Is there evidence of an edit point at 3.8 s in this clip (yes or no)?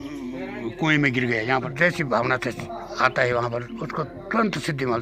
no